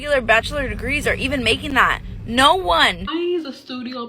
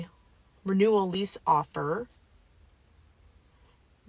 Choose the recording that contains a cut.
first; 1 cut; at 3.1 s

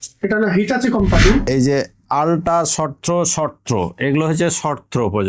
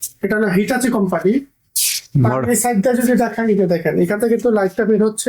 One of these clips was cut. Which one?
first; 1 cut; at 1.4 s

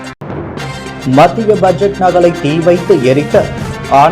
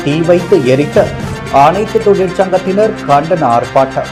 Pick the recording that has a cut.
first; 1 cut; at 1.0 s

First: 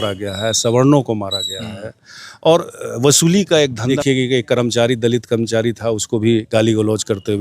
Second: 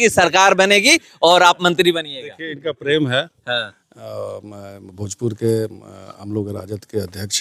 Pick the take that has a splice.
first; 1 cut; at 4.0 s

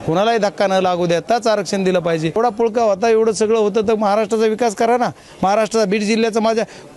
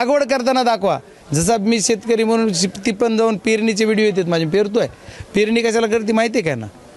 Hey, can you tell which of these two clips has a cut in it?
first; 1 cut; at 2.4 s

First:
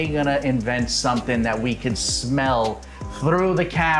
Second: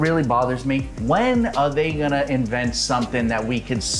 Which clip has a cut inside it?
second; 1 cut; at 0.9 s

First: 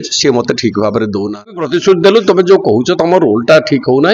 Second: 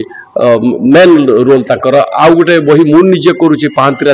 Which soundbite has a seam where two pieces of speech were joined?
first; 1 cut; at 1.5 s

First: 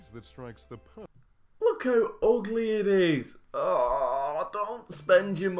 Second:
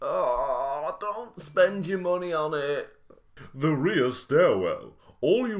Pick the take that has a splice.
second; 1 cut; at 3.4 s

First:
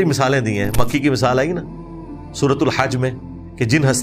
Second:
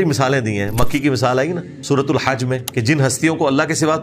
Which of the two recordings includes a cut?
second; 2 cuts; at 1.7 s, 2.7 s

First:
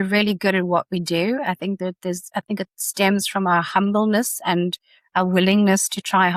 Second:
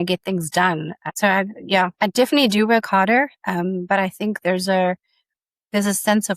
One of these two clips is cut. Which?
second; 1 cut; at 1.0 s

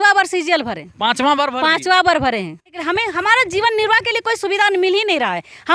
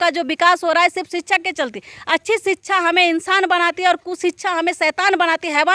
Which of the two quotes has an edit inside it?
first; 1 cut; at 2.8 s

